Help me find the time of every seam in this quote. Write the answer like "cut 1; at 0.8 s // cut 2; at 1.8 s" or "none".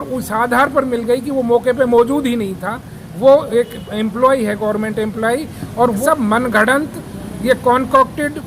cut 1; at 6.0 s